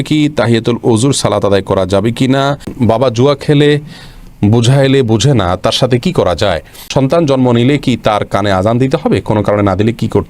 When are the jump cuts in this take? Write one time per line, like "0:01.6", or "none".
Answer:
0:02.7
0:06.8